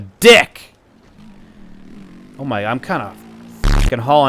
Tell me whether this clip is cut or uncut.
cut